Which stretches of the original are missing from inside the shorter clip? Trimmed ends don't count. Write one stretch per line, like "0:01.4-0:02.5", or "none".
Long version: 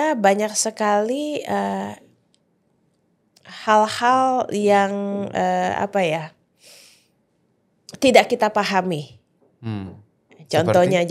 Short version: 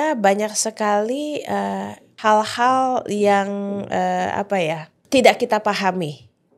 0:02.0-0:03.4
0:06.4-0:07.8